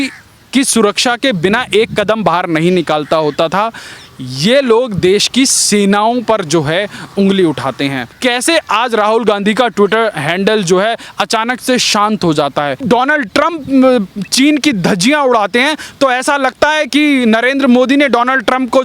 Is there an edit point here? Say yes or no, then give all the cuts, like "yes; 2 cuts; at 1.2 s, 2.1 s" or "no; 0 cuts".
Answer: yes; 2 cuts; at 8.2 s, 12.8 s